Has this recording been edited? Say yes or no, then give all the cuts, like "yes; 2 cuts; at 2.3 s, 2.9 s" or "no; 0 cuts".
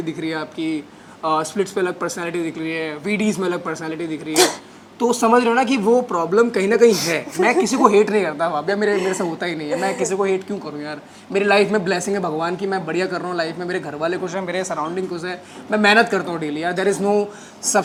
no; 0 cuts